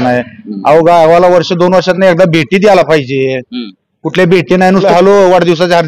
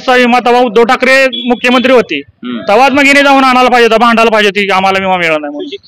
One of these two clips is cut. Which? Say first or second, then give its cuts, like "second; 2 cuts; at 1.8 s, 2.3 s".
first; 1 cut; at 4.9 s